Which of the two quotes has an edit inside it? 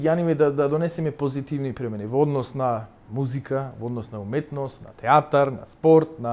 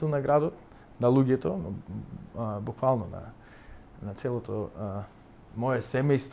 first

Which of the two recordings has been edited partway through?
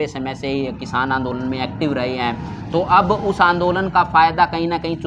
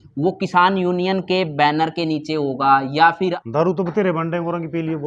second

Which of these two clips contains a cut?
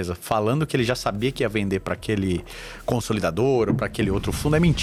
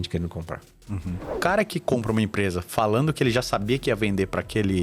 second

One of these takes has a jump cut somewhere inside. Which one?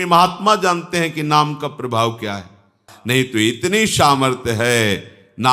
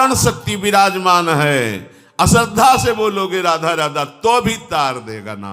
first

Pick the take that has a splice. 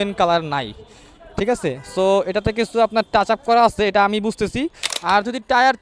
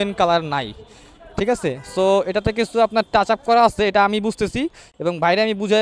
first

